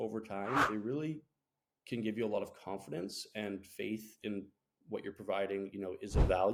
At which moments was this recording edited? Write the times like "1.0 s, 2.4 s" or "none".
none